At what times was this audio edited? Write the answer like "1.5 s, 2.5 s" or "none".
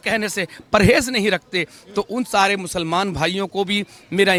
none